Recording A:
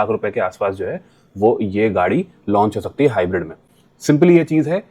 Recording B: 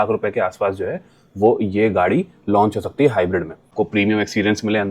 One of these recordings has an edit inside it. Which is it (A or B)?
B